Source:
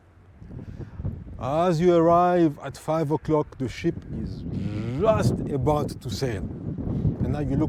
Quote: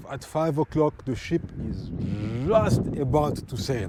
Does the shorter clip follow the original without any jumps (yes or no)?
yes